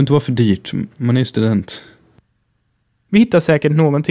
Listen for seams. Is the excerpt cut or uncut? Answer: cut